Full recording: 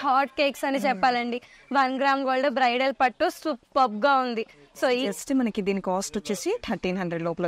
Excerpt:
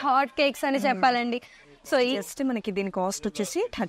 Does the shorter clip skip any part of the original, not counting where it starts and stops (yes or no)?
yes